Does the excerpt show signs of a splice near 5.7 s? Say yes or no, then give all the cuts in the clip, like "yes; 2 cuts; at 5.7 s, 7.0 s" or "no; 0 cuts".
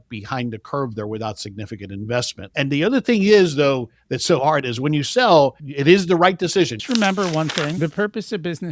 yes; 2 cuts; at 5.7 s, 6.8 s